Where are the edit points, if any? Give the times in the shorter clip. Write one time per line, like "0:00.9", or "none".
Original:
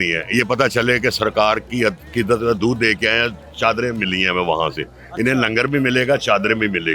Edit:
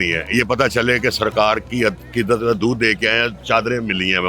0:03.4